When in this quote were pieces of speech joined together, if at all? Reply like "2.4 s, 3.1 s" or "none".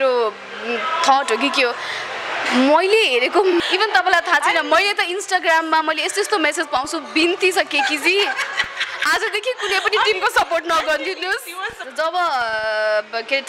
3.6 s, 11.8 s